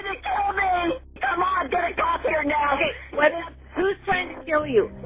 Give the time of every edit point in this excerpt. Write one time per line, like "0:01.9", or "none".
0:01.2